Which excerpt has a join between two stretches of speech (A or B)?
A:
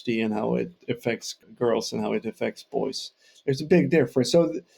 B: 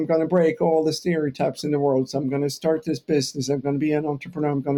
A